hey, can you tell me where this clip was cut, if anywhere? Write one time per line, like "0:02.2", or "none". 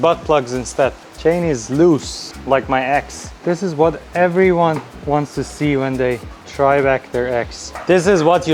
0:01.1
0:03.3